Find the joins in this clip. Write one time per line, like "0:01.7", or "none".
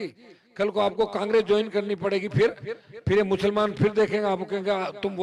none